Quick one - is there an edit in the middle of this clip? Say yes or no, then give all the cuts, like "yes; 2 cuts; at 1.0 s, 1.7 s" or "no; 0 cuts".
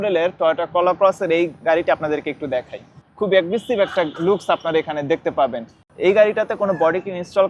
yes; 2 cuts; at 3.0 s, 5.8 s